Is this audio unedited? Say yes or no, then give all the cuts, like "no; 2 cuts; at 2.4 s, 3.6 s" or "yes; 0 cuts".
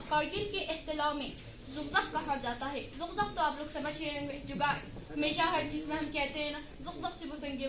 yes; 0 cuts